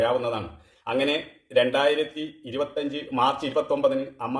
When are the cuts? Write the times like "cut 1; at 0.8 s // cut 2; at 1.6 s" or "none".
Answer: none